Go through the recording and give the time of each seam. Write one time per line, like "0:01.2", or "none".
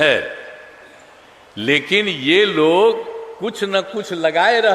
none